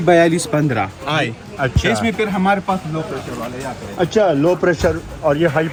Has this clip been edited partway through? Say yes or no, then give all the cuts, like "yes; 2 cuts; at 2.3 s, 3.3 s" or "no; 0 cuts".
no; 0 cuts